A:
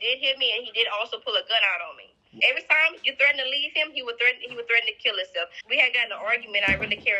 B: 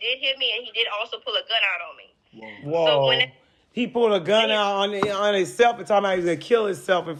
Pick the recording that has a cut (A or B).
A